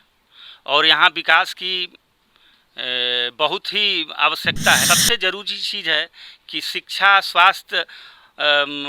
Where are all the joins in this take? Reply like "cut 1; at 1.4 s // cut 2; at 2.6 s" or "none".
cut 1; at 4.8 s